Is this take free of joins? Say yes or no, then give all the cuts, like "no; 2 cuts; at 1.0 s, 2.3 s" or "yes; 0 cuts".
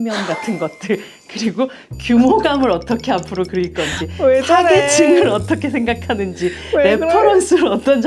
yes; 0 cuts